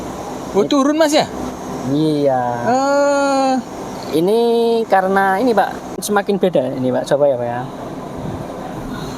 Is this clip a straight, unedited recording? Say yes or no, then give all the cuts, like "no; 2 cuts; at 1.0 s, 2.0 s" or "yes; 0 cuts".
no; 1 cut; at 6.0 s